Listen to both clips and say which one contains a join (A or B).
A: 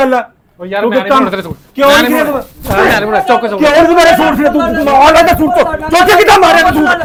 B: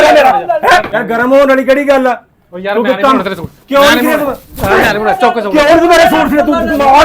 B